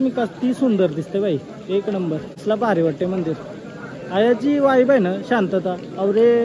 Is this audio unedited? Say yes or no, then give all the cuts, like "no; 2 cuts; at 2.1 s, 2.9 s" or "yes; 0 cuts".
yes; 0 cuts